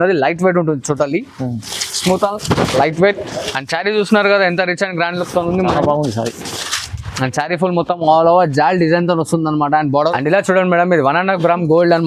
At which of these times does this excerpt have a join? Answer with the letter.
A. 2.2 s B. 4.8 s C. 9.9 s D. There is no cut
C